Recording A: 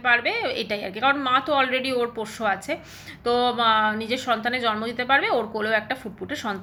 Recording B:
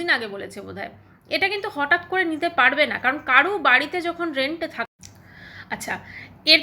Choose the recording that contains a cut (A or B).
B